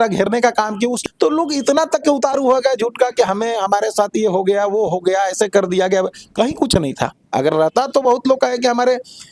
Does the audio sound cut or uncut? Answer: cut